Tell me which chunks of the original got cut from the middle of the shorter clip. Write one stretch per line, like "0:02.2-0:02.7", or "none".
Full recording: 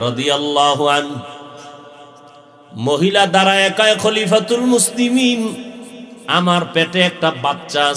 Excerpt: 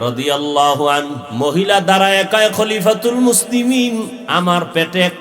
0:01.2-0:02.7
0:05.6-0:06.2